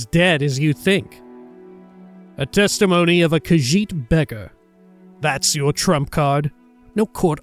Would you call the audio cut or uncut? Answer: cut